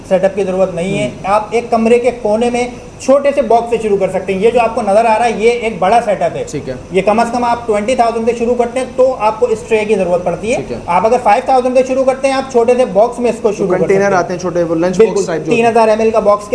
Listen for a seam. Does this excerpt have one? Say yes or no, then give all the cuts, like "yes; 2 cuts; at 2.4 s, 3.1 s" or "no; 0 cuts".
no; 0 cuts